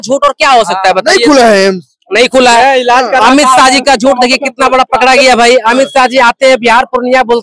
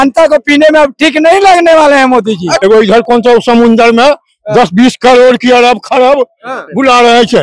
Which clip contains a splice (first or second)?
second